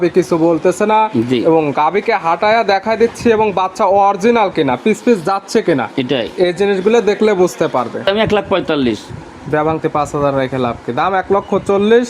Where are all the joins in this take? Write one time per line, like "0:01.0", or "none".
0:08.0